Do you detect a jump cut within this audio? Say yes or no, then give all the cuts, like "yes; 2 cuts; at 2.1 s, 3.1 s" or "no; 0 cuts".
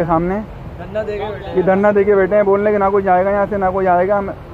no; 0 cuts